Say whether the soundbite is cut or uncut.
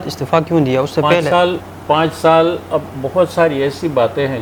uncut